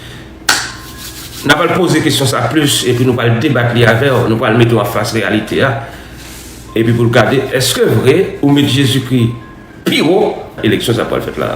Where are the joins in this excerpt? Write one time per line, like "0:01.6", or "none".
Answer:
0:10.6

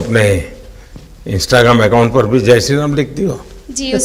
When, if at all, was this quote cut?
none

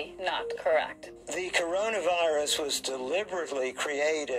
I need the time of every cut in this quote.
0:01.0

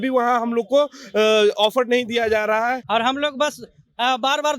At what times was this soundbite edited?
0:02.8

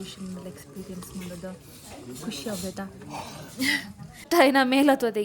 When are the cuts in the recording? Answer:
0:04.2

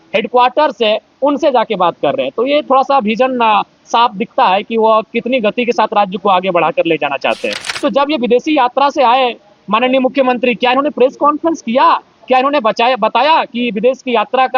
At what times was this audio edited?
0:07.6

